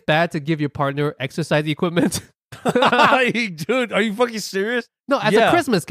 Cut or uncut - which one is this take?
uncut